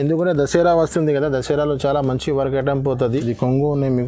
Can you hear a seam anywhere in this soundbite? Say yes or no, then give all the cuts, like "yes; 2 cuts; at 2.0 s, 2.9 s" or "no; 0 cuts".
yes; 1 cut; at 3.1 s